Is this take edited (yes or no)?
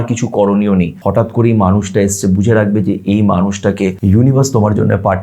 yes